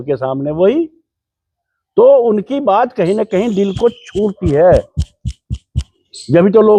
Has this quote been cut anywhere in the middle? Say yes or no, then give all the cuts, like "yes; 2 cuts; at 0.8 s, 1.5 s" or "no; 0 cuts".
no; 0 cuts